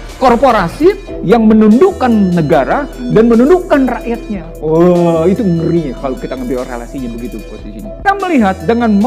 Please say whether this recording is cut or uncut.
cut